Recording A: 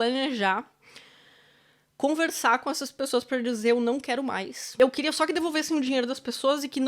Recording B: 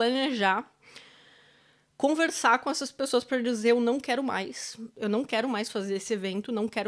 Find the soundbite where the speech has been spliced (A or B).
A